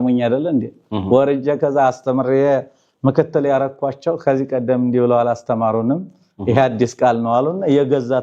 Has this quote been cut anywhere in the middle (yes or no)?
no